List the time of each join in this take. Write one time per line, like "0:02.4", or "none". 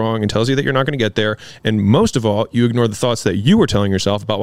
none